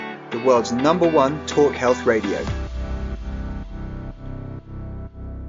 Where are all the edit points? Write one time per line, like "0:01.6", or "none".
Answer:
0:02.5

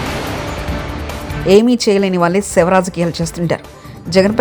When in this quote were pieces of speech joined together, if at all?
0:01.2

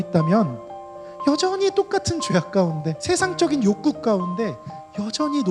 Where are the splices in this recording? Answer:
0:02.9

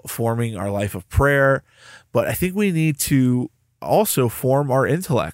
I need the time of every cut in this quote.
none

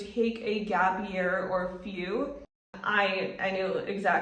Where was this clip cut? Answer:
0:02.7

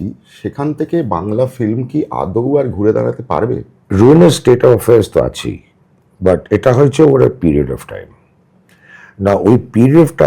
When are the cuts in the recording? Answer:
0:03.7

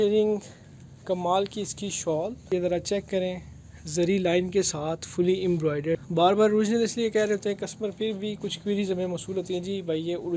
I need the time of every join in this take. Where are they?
0:02.4
0:06.0

